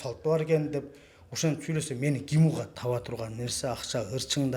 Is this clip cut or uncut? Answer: cut